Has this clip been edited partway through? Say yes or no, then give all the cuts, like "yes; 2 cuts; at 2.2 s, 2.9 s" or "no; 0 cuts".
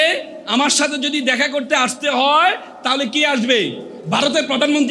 no; 0 cuts